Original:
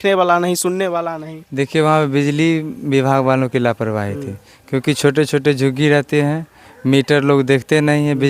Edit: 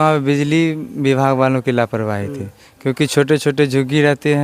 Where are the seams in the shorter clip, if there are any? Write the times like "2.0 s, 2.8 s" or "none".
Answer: none